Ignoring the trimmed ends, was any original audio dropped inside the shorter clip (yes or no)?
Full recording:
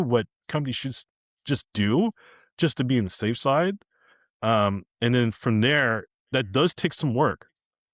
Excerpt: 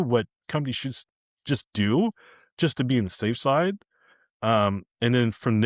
no